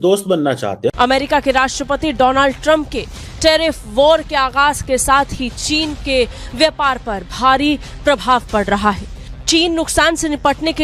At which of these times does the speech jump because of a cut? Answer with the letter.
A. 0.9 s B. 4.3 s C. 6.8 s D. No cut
A